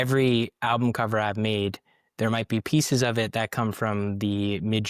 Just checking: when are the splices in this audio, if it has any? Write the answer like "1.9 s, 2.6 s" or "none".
none